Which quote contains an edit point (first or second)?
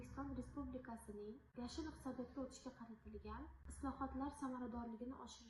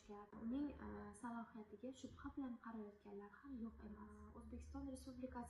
second